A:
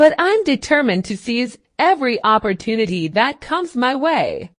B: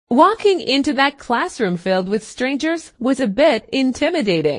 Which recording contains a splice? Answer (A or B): A